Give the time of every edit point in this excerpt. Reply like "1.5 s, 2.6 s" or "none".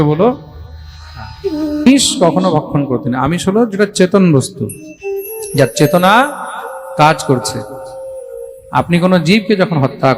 1.9 s